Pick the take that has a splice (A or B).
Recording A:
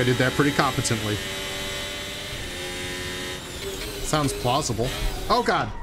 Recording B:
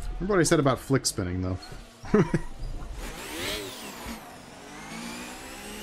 A